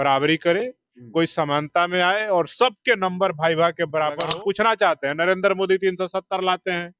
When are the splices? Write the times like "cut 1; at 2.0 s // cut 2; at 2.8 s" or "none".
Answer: cut 1; at 4.3 s